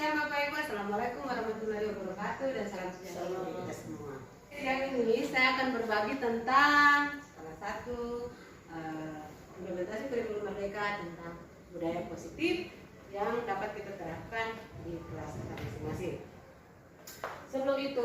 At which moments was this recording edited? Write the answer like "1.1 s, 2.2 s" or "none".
4.6 s

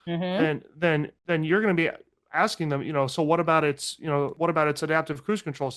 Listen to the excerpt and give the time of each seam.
1.1 s, 4.3 s

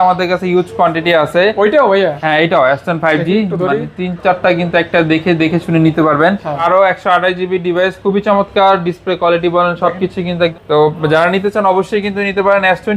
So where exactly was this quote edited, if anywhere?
6.6 s, 10.6 s

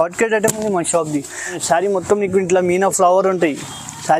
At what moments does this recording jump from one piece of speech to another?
1.6 s

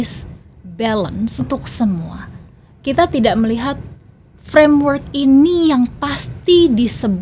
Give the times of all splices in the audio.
1.5 s

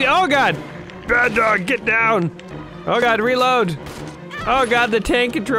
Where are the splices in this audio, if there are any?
2.9 s

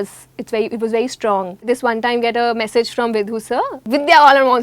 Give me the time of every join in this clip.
1.7 s, 3.9 s

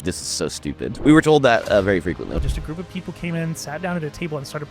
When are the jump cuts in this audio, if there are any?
0.9 s, 2.4 s

